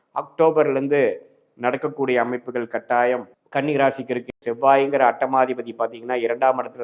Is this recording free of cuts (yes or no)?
no